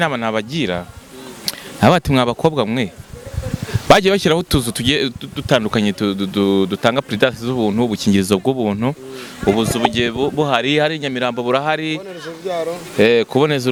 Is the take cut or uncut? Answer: uncut